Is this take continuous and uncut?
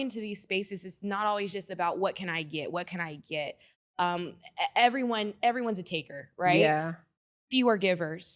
yes; 0 cuts

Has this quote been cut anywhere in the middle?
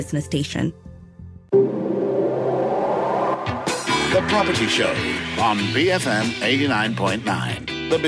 yes; 1 cut; at 1.1 s

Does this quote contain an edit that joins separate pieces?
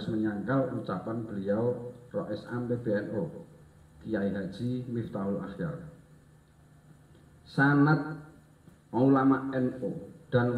no; 0 cuts

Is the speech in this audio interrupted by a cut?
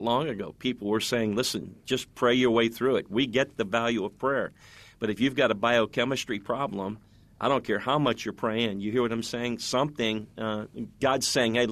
no; 0 cuts

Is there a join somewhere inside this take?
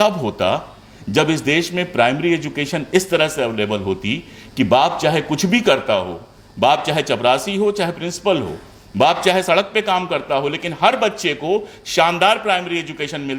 no; 0 cuts

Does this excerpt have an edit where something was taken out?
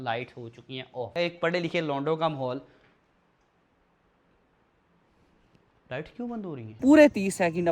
yes; 2 cuts; at 1.1 s, 6.8 s

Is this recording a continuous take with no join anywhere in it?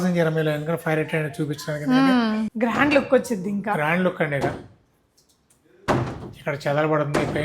no; 1 cut; at 2.5 s

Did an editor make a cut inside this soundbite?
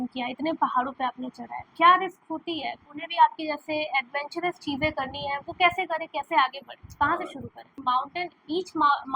yes; 2 cuts; at 2.9 s, 7.7 s

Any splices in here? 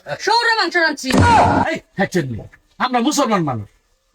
yes; 2 cuts; at 1.0 s, 1.8 s

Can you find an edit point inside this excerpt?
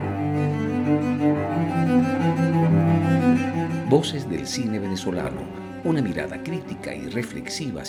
no; 0 cuts

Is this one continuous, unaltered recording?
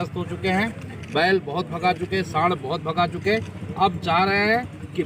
yes; 0 cuts

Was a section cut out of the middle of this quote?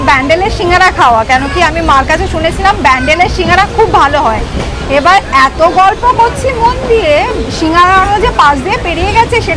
no; 0 cuts

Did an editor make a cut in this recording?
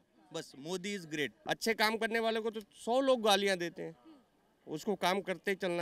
yes; 1 cut; at 1.4 s

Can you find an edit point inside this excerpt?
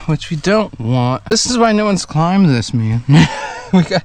yes; 1 cut; at 1.2 s

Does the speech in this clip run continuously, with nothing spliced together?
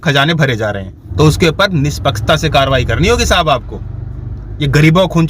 no; 1 cut; at 1.0 s

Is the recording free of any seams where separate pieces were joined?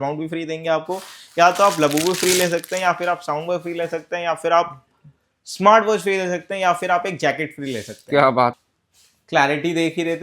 no; 1 cut; at 8.6 s

